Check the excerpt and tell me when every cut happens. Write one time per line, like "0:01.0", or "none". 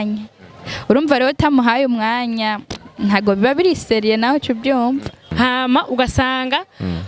0:05.3